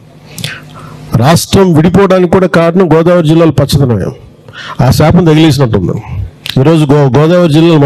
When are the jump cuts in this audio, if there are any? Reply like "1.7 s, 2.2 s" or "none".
none